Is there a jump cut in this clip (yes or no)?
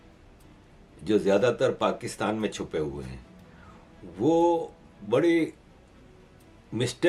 no